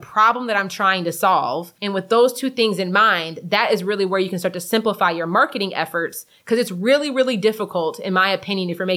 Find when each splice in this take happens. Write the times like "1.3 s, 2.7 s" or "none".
1.7 s